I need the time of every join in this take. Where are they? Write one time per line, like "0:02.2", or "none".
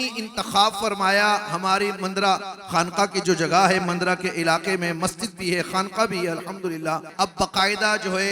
0:07.1